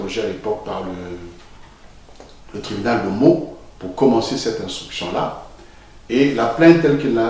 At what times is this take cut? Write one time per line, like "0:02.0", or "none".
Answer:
none